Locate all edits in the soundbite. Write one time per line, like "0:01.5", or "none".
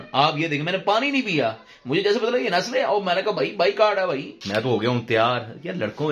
0:04.3